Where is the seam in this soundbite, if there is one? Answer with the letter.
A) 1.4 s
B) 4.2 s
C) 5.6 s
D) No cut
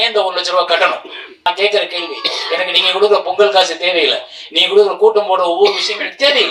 A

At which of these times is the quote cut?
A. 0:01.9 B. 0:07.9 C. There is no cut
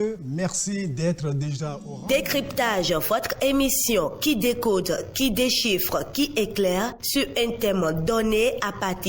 C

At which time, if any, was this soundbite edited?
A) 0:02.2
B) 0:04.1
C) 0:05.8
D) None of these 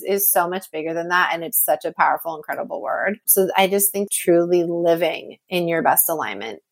B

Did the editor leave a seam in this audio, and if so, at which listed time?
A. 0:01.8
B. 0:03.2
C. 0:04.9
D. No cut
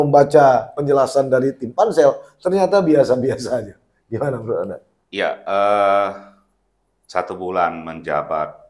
D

